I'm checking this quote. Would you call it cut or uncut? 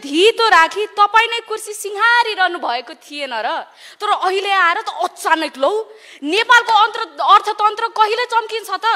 uncut